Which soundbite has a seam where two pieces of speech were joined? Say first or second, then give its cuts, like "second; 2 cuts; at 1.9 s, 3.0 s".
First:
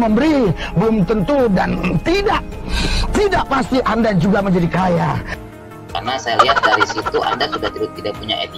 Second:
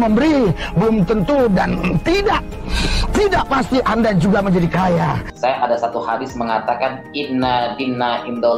second; 1 cut; at 5.3 s